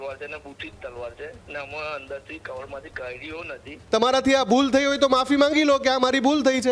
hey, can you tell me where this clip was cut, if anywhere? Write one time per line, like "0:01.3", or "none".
0:03.8